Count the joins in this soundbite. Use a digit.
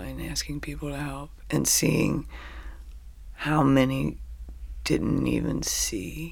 0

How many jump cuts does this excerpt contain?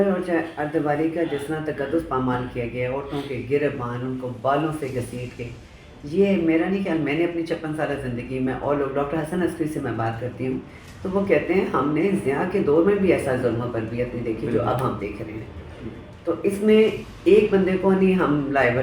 0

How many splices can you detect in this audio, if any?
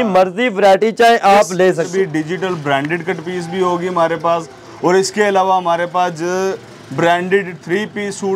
1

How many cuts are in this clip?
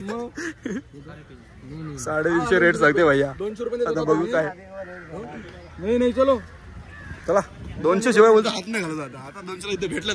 0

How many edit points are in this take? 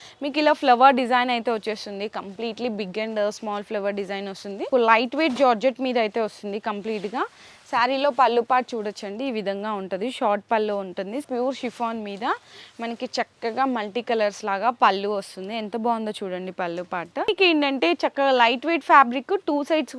3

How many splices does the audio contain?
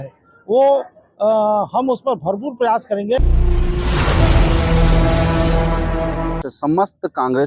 2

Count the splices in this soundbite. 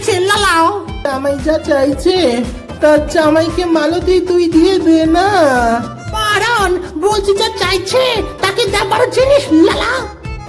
1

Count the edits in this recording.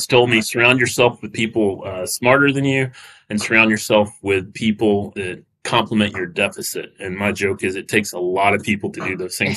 0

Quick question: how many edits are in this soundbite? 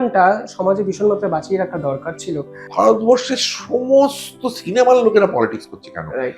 1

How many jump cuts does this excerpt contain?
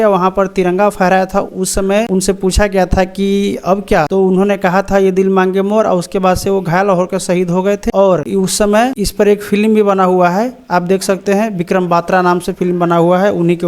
4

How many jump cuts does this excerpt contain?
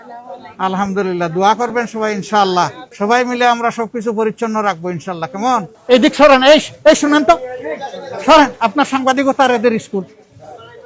2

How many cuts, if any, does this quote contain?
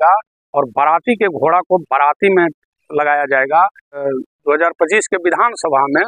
1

